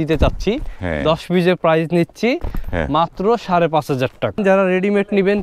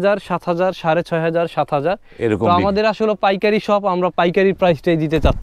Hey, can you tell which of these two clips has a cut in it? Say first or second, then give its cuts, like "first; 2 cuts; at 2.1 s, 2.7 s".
first; 1 cut; at 4.4 s